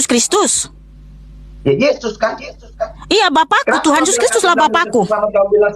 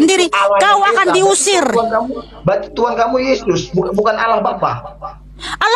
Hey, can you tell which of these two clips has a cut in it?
second; 1 cut; at 2.3 s

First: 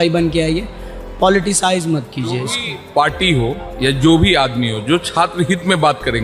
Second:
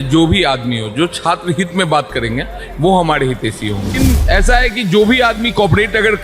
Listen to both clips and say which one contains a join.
second; 1 cut; at 3.9 s

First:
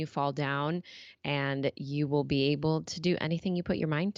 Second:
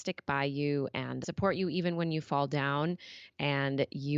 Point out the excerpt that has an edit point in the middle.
second; 1 cut; at 1.2 s

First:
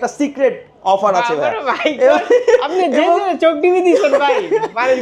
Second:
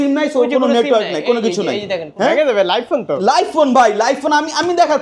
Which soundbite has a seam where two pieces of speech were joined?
second; 1 cut; at 2.1 s

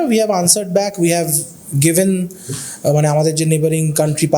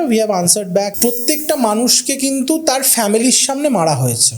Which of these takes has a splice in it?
second; 1 cut; at 0.9 s

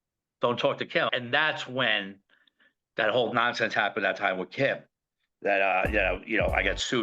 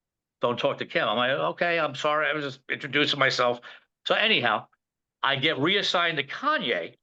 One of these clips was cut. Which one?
first; 1 cut; at 1.1 s

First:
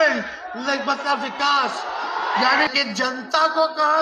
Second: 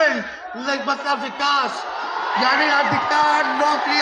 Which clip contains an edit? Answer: first; 1 cut; at 2.7 s

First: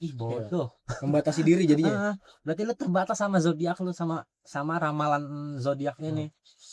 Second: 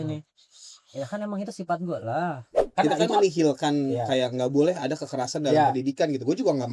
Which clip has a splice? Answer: second; 1 cut; at 2.6 s

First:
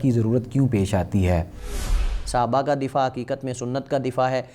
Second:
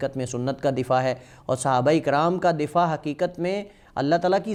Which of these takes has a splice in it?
first; 1 cut; at 1.9 s

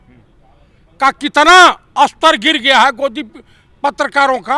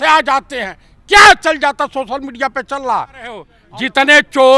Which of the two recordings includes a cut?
second; 1 cut; at 3.5 s

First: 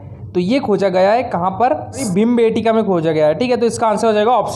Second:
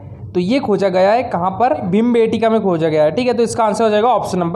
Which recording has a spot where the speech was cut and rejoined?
second; 1 cut; at 1.8 s

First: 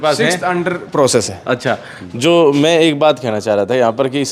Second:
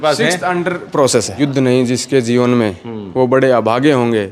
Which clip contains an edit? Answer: second; 1 cut; at 1.3 s

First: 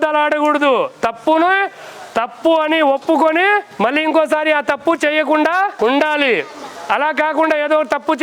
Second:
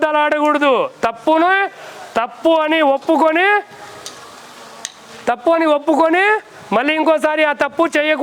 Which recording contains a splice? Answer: first; 2 cuts; at 3.7 s, 5.7 s

